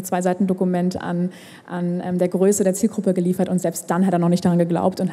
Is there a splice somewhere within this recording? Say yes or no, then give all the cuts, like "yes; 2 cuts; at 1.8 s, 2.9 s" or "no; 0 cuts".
no; 0 cuts